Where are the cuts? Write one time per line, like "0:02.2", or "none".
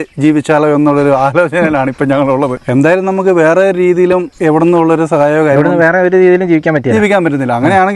0:02.6
0:04.3